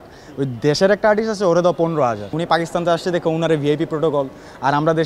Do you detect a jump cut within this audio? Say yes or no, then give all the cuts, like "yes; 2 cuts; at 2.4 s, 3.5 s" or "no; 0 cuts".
yes; 1 cut; at 2.3 s